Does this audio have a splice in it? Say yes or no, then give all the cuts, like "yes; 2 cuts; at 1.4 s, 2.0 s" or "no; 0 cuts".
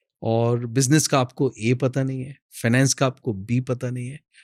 no; 0 cuts